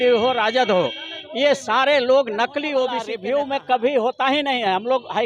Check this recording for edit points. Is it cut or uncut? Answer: cut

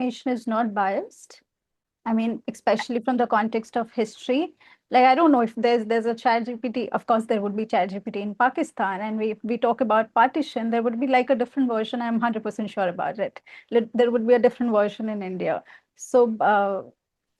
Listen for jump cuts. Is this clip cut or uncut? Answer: uncut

